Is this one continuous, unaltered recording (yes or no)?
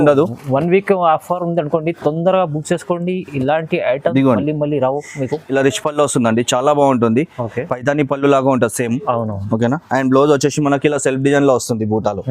no